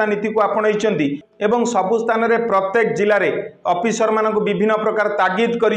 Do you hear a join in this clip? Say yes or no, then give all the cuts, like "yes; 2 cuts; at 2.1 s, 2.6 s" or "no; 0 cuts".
yes; 1 cut; at 1.2 s